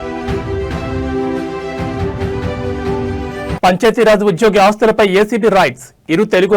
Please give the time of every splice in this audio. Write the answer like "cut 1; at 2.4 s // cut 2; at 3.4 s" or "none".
cut 1; at 3.5 s